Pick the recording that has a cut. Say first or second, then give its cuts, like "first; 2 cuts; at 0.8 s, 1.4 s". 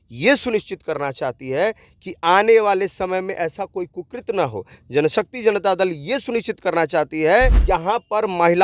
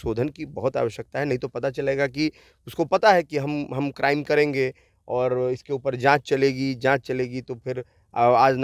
first; 1 cut; at 7.6 s